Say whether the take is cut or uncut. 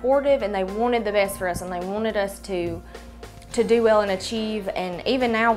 uncut